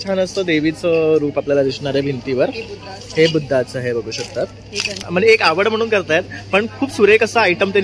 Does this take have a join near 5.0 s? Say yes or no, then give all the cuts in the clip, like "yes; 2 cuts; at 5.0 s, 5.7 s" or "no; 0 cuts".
yes; 1 cut; at 5.0 s